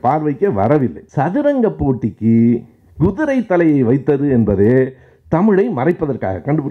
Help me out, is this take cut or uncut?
cut